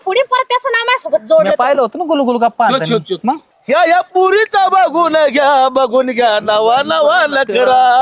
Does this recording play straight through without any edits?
no; 1 cut; at 3.5 s

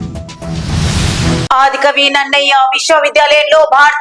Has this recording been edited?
no; 0 cuts

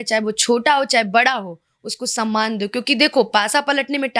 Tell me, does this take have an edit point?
no; 0 cuts

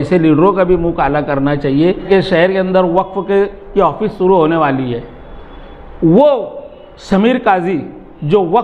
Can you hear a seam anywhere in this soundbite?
yes; 1 cut; at 2.0 s

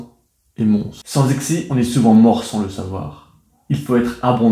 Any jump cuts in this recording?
yes; 1 cut; at 1.0 s

